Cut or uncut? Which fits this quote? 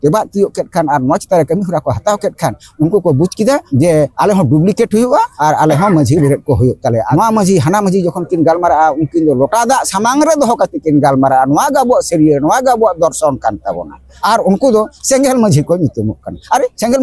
cut